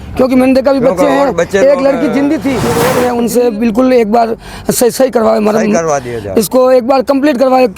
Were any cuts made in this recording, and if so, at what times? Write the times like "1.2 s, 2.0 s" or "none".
2.8 s

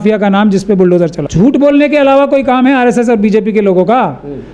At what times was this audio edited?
1.2 s

